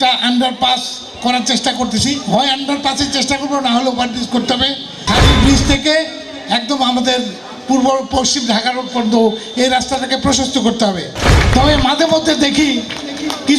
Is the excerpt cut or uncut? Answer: cut